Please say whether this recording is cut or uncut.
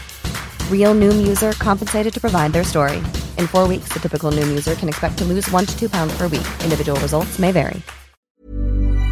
cut